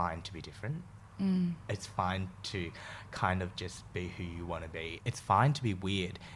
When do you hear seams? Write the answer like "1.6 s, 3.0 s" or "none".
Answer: none